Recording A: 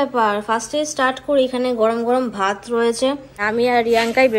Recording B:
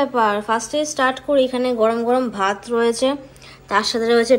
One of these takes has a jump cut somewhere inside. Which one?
A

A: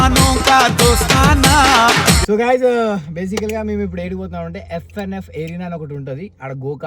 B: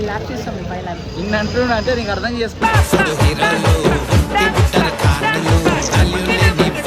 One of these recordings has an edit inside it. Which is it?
A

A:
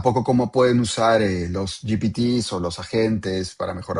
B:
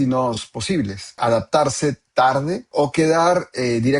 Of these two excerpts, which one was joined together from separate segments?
B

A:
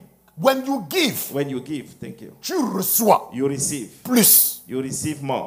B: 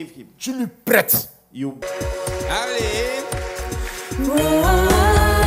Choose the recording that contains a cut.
B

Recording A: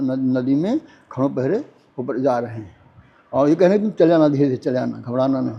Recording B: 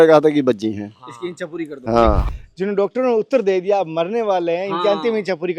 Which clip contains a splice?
B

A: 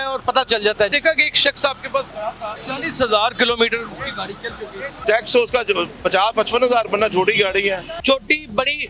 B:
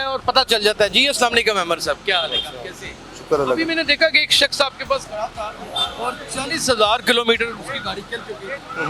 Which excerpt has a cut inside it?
A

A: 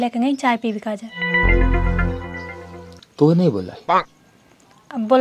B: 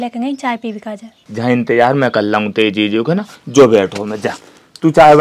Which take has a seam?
B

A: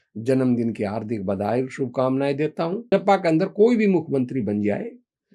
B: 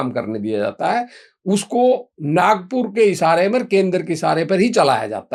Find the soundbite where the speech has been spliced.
A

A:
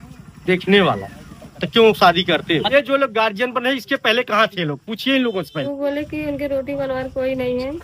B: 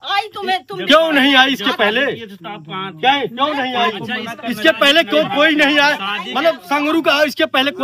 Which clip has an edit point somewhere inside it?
A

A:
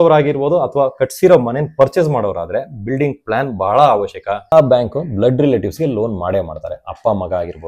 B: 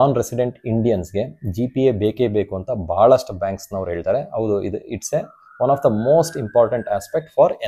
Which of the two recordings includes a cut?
A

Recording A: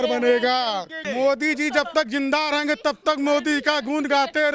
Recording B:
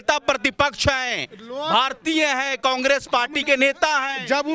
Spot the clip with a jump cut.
A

